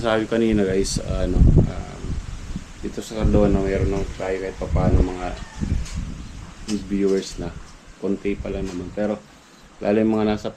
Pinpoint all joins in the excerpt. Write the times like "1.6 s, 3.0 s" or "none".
none